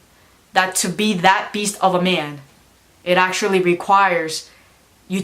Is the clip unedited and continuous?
yes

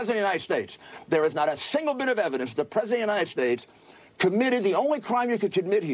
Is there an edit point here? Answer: yes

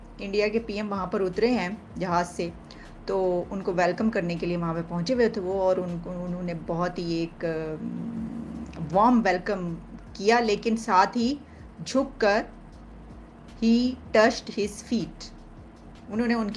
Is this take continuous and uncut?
yes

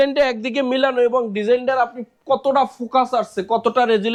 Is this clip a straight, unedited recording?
yes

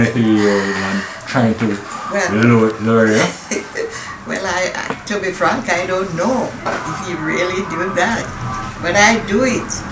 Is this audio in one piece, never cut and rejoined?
yes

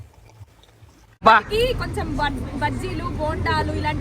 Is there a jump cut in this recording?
yes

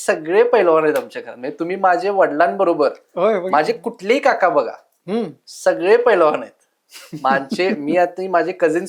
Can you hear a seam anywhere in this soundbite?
no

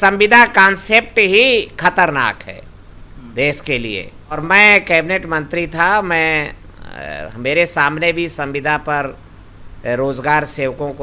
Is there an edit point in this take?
yes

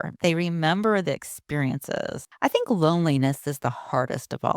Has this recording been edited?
yes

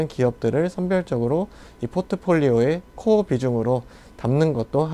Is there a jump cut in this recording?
no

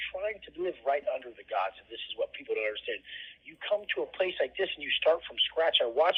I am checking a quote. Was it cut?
no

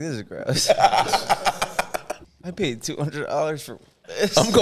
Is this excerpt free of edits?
no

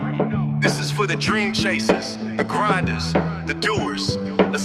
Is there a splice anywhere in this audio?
no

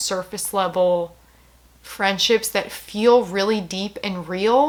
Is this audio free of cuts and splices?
yes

